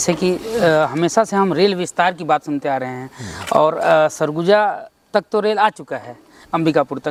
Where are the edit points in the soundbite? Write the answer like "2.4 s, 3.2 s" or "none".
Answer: none

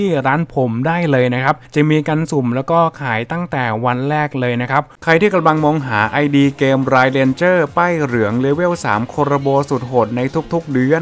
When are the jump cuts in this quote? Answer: 5.0 s

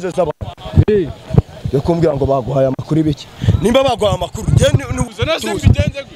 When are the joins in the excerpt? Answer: 5.0 s

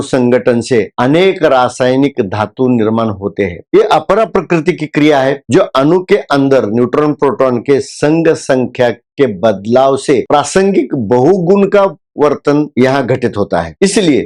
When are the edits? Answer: none

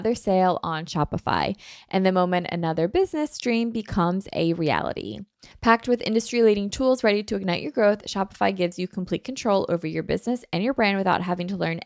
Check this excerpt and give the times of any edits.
5.4 s

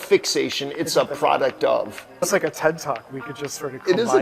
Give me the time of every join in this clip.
2.3 s

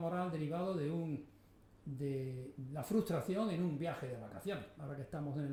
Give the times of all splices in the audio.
none

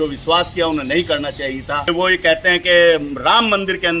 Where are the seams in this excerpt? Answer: 1.9 s

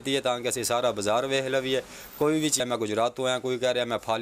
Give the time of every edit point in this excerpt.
2.6 s

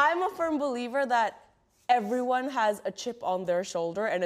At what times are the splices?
none

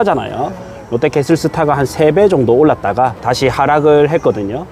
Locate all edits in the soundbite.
3.2 s

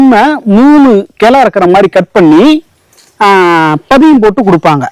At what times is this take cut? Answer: none

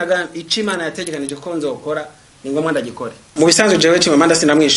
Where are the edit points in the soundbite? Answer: none

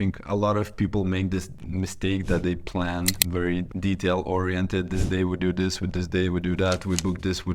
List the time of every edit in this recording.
1.6 s, 3.7 s

